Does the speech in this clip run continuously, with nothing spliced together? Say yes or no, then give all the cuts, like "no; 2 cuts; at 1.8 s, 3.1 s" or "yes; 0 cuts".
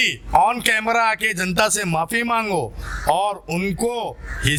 yes; 0 cuts